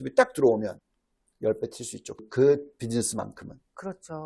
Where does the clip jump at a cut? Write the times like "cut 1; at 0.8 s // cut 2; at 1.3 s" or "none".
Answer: cut 1; at 2.2 s